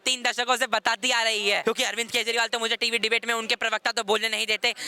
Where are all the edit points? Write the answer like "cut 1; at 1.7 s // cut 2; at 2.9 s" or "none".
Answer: cut 1; at 1.6 s